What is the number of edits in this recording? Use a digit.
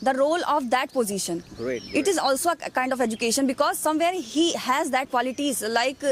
1